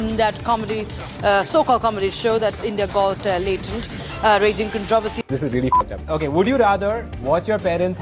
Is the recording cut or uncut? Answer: cut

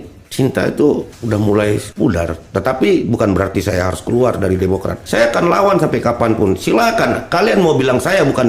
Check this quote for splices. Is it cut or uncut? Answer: cut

